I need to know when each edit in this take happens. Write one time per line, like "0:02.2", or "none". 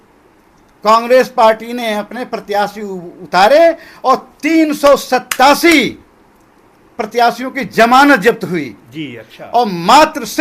none